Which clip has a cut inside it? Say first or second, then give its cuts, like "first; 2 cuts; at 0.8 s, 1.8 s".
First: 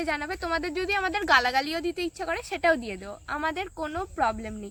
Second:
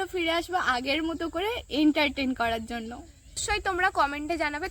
second; 1 cut; at 3.4 s